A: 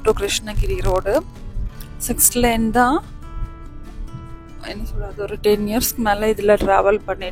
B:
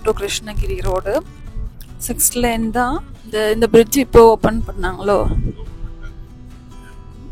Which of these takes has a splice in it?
B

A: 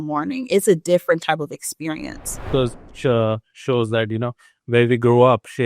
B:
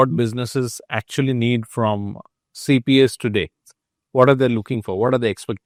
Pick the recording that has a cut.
A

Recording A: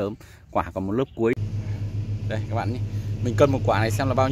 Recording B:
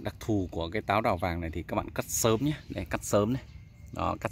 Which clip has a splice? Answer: A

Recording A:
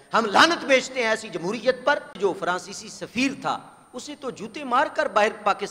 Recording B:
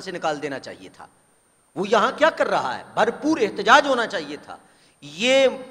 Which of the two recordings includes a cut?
A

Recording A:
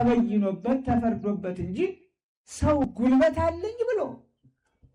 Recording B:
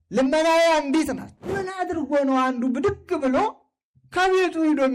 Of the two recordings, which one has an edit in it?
B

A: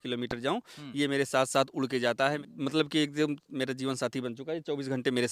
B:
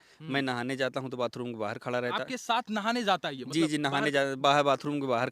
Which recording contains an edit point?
A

